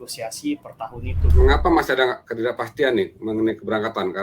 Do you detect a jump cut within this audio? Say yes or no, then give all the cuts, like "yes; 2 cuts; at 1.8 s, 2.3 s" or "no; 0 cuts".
yes; 1 cut; at 1.3 s